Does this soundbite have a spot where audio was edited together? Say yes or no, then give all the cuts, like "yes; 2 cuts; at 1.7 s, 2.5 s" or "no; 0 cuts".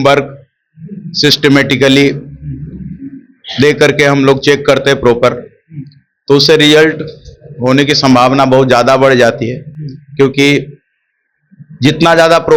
no; 0 cuts